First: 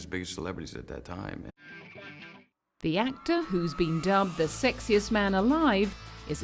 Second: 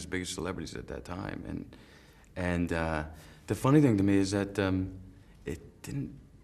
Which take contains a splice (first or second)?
second